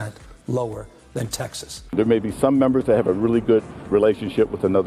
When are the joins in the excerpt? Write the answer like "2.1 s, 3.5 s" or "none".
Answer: 1.8 s